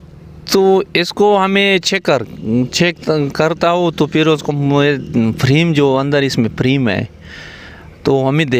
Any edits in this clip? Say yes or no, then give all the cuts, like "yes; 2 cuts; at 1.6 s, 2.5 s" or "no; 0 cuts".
no; 0 cuts